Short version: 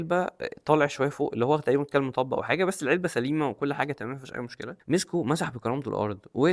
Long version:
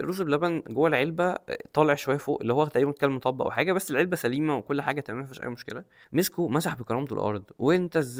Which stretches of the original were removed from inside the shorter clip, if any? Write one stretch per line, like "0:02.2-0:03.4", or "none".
0:05.8-0:05.9